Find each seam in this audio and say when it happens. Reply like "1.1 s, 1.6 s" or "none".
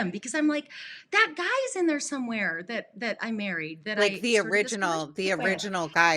4.0 s